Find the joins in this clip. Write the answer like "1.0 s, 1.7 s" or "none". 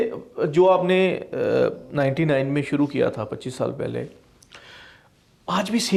none

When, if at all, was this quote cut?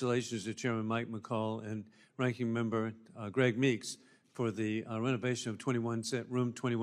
2.9 s

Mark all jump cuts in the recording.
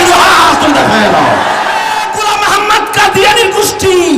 2.1 s

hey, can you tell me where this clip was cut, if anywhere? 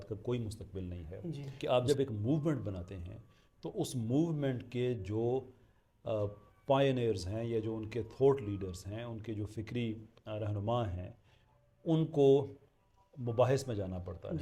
1.5 s

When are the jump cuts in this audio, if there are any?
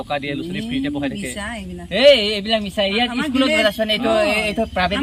none

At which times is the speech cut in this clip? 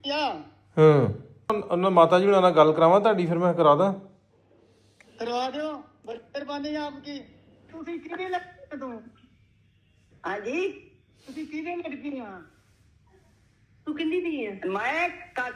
1.6 s, 7.7 s

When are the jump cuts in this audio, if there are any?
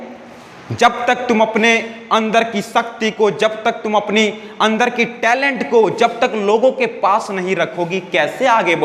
none

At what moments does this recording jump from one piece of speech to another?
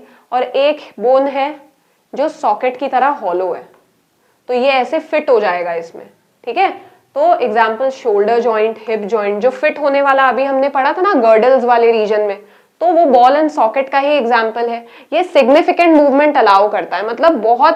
none

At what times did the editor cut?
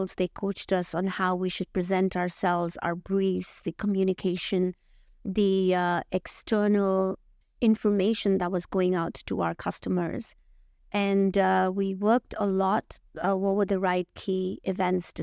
none

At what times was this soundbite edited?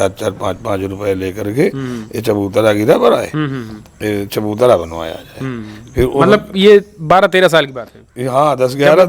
none

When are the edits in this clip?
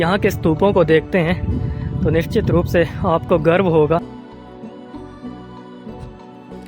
none

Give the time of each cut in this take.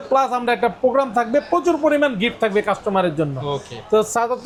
none

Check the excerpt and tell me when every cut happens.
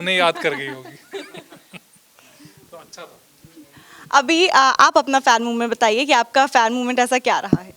none

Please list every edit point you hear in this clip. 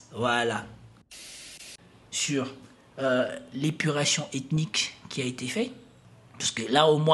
1.4 s

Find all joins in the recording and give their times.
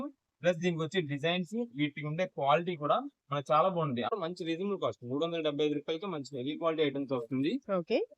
4.1 s

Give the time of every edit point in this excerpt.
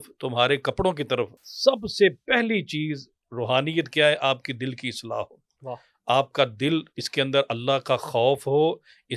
1.4 s

